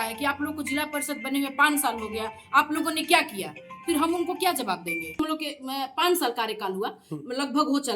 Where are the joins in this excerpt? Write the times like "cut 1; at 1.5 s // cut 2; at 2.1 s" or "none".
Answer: cut 1; at 5.2 s